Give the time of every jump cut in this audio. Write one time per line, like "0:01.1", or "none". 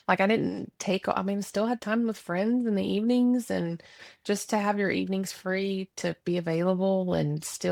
none